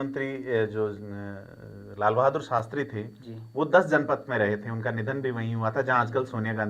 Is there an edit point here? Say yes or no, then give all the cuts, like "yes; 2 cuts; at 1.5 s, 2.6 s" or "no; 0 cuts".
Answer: no; 0 cuts